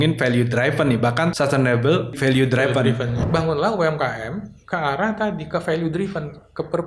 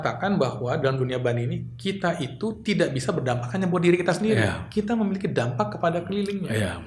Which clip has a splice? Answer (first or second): first